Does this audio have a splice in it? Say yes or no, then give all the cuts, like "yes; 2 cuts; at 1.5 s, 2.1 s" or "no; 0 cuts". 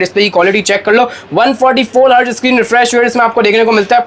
no; 0 cuts